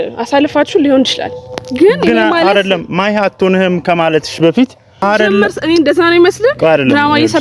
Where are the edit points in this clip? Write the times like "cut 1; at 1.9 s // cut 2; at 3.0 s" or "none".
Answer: cut 1; at 5.0 s